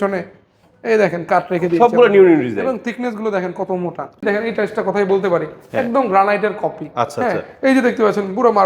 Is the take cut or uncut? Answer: cut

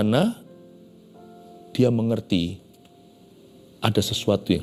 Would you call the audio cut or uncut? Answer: uncut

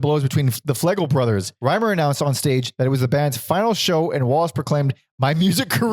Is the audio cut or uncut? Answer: cut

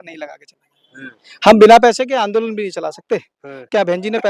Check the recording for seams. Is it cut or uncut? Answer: uncut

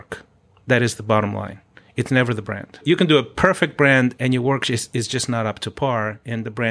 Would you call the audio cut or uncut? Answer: cut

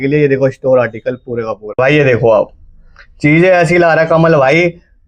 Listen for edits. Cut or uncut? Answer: cut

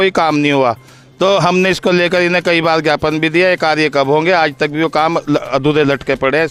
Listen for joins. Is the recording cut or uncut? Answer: uncut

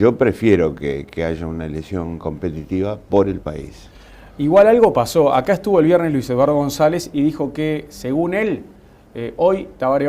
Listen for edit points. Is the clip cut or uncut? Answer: cut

